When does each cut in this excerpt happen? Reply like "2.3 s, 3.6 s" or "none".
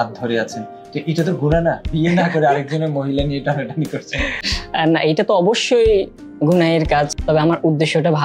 1.9 s, 4.6 s, 7.2 s